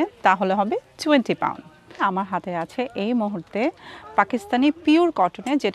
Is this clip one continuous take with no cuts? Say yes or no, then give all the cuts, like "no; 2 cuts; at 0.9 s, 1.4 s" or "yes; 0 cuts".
yes; 0 cuts